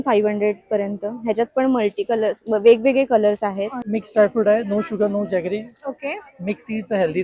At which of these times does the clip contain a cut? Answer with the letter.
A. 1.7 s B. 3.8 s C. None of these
B